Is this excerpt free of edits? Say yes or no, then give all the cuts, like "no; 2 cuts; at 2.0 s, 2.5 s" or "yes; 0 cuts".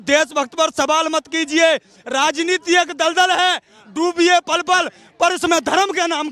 no; 1 cut; at 2.1 s